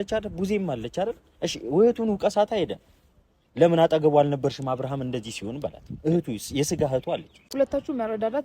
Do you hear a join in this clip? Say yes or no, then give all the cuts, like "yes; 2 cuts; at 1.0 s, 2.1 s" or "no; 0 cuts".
yes; 1 cut; at 7.3 s